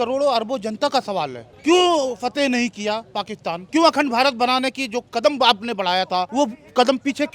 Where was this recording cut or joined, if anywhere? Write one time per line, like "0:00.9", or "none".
0:01.4
0:03.6
0:06.3